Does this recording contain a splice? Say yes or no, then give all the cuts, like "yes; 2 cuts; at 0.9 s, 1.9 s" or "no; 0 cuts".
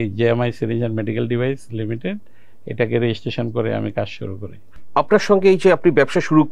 no; 0 cuts